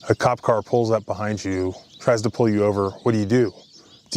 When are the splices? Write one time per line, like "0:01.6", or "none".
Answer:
0:01.8